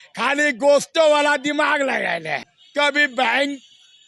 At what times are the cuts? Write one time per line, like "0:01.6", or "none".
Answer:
0:02.4